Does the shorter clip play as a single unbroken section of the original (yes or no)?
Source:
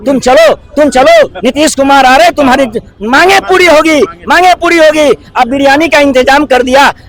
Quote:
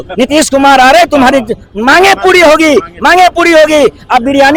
yes